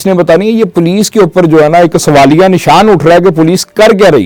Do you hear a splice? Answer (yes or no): no